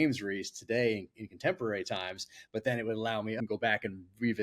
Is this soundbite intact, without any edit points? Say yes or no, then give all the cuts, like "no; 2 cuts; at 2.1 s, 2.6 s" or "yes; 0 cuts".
no; 1 cut; at 3.4 s